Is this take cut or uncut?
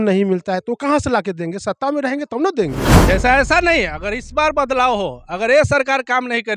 cut